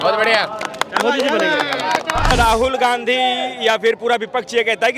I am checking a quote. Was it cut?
yes; 1 cut; at 2.3 s

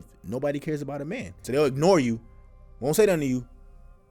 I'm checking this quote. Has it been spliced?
yes; 1 cut; at 1.4 s

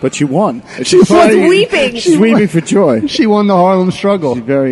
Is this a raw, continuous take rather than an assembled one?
yes; 0 cuts

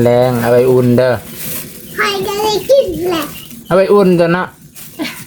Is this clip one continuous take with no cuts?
yes; 0 cuts

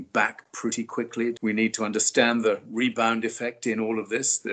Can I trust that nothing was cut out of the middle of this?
no; 1 cut; at 1.4 s

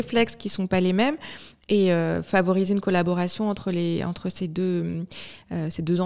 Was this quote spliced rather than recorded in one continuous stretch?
no; 0 cuts

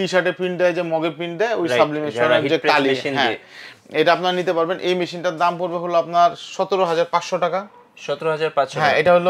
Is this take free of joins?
yes; 0 cuts

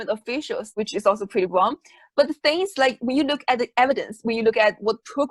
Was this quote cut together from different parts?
no; 0 cuts

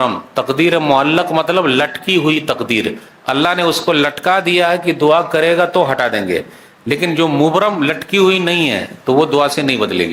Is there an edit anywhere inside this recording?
no; 0 cuts

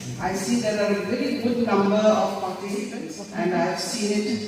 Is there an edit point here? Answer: yes; 1 cut; at 2.8 s

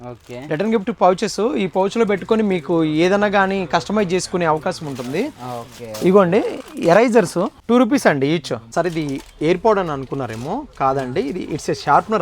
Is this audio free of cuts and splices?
no; 2 cuts; at 7.6 s, 8.6 s

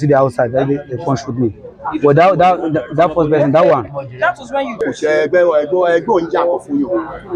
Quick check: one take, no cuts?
no; 1 cut; at 4.8 s

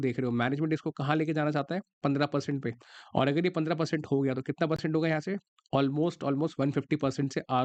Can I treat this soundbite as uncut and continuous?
yes; 0 cuts

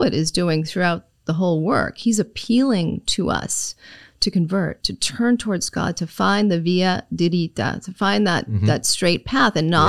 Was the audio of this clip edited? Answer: no; 0 cuts

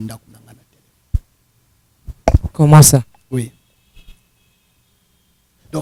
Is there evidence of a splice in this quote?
no; 0 cuts

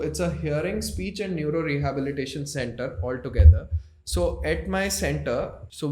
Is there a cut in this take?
no; 0 cuts

